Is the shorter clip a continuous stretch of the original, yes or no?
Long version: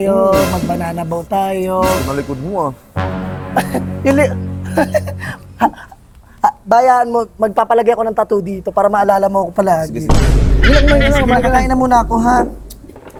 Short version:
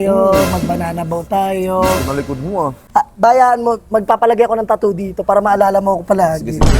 no